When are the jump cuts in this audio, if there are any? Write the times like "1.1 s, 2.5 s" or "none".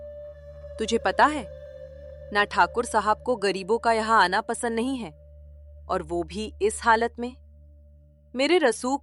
none